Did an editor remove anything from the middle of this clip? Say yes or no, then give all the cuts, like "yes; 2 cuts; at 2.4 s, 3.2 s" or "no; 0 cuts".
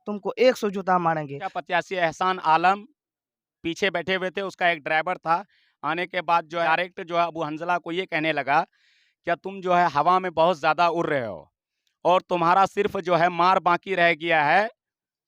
yes; 2 cuts; at 1.6 s, 6.7 s